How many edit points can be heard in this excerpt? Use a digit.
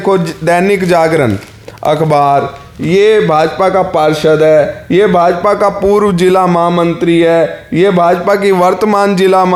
0